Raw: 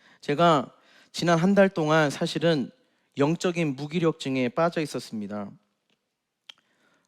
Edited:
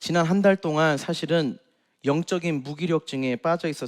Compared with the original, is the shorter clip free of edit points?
yes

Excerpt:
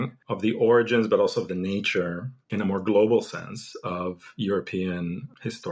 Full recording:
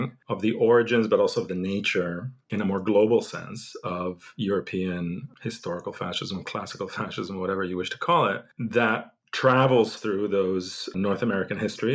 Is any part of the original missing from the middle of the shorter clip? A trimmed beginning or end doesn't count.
no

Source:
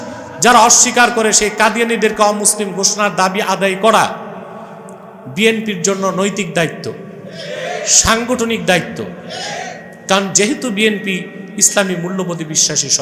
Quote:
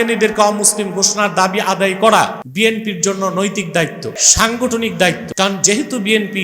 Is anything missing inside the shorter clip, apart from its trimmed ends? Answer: yes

